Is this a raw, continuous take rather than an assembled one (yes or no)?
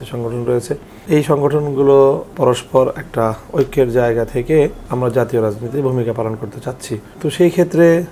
no